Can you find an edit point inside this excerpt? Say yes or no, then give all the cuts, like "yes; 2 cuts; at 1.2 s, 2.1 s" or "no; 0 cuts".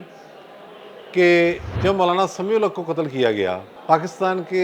yes; 2 cuts; at 1.7 s, 3.7 s